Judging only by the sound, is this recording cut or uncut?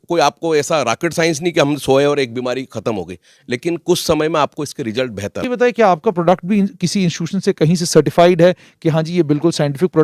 cut